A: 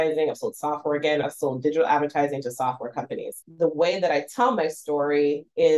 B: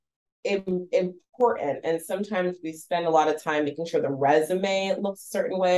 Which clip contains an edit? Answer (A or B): A